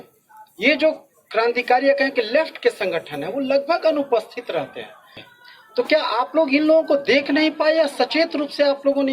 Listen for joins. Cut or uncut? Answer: cut